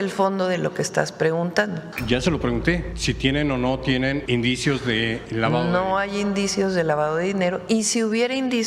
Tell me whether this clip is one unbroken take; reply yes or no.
no